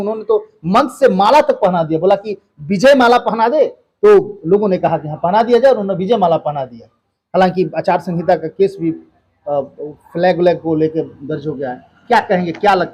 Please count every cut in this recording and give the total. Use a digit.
0